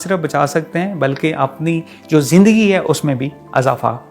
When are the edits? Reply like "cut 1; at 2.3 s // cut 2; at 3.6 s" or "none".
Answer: none